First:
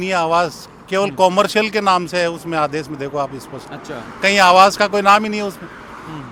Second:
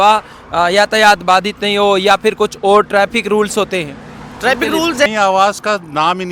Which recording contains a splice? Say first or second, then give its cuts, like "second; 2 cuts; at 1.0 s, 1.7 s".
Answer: second; 1 cut; at 5.1 s